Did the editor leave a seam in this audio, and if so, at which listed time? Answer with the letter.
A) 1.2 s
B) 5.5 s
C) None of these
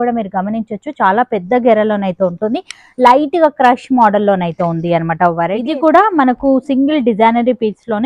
B